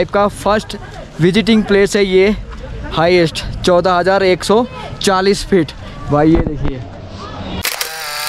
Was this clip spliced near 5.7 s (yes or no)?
no